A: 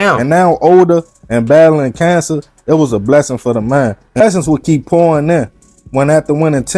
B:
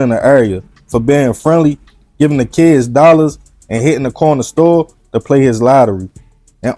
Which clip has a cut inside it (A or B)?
A